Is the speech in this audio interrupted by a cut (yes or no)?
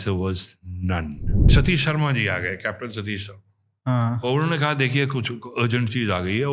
yes